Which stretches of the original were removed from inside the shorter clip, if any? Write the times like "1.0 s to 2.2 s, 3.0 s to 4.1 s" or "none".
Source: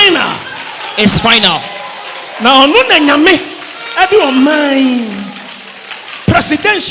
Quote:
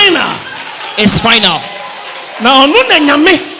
none